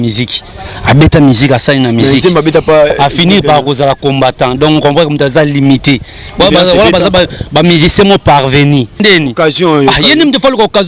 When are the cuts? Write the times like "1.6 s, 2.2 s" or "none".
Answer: 9.0 s